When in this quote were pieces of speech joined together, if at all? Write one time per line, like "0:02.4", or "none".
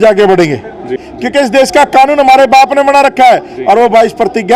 0:01.1